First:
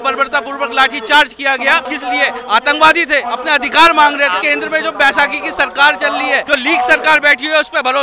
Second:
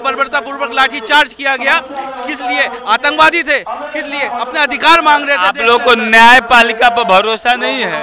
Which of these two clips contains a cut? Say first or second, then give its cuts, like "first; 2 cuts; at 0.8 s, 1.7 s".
first; 4 cuts; at 1.9 s, 3.3 s, 4.4 s, 6.4 s